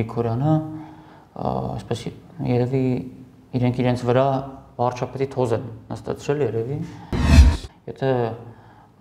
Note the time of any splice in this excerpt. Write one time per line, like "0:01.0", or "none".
0:07.5